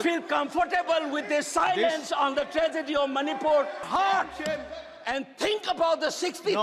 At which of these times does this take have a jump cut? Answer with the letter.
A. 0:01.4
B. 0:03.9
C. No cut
B